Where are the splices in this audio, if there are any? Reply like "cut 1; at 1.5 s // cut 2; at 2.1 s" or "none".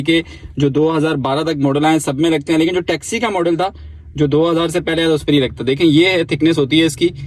none